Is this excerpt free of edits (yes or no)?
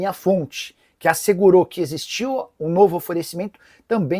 yes